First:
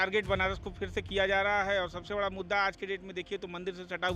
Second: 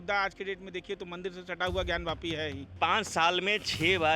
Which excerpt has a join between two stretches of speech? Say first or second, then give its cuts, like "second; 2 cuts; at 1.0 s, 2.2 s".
second; 1 cut; at 2.7 s